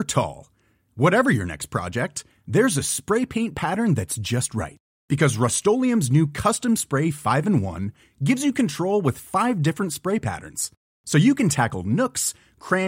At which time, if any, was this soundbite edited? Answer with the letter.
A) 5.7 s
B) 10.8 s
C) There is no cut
C